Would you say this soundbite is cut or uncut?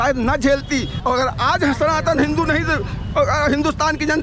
uncut